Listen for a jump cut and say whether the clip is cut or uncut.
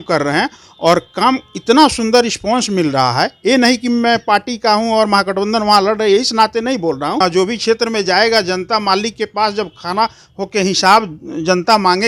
cut